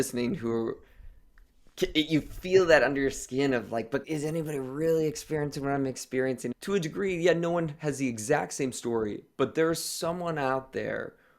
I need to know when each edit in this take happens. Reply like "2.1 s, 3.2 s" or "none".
6.6 s